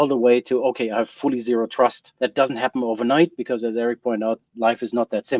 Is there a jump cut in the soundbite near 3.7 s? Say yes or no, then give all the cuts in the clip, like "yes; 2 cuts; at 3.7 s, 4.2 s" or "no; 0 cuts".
no; 1 cut; at 2.1 s